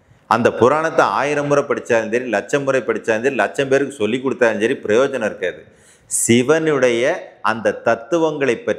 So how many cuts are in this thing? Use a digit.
0